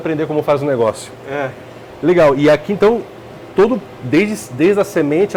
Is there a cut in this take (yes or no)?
no